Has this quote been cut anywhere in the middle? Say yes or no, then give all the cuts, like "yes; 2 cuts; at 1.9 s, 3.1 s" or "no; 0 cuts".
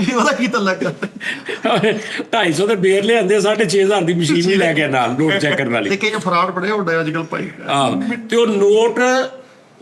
no; 0 cuts